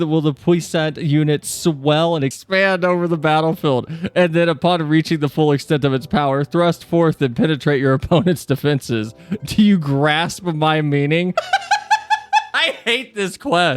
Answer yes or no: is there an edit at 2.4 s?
yes